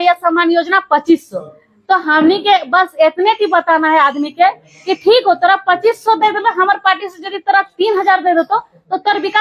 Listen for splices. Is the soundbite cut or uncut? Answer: uncut